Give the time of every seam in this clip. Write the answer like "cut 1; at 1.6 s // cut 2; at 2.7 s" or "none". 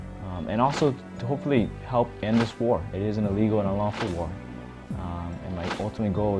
cut 1; at 1.1 s